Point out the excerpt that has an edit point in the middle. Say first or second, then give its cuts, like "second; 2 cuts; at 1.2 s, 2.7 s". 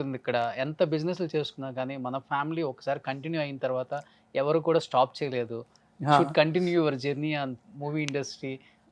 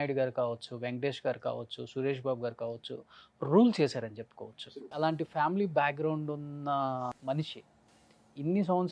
second; 2 cuts; at 4.9 s, 7.1 s